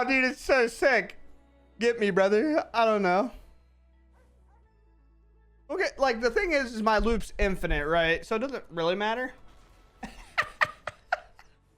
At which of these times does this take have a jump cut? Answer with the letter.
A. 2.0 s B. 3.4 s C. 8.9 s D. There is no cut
D